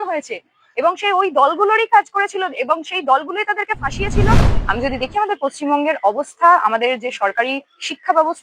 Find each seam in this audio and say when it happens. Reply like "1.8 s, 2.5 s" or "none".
4.5 s